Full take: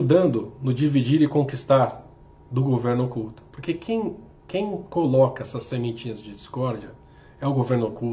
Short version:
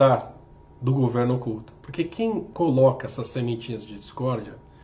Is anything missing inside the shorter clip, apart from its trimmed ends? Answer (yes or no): yes